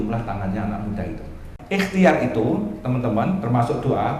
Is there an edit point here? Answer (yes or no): yes